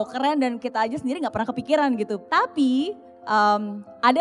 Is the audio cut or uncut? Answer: cut